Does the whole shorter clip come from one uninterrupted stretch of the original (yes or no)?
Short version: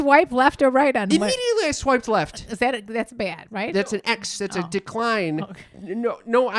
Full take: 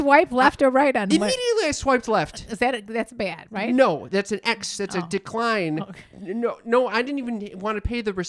no